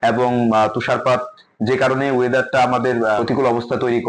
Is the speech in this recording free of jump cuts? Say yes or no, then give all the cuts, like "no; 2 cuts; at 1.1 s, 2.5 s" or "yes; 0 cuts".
no; 1 cut; at 3.2 s